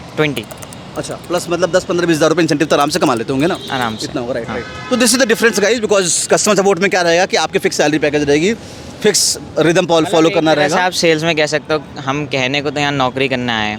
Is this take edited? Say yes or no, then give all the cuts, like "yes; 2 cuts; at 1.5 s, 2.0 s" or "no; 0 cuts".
no; 0 cuts